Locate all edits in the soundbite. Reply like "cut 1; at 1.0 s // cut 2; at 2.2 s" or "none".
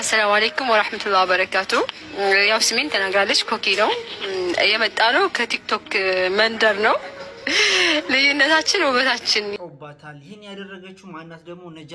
cut 1; at 9.6 s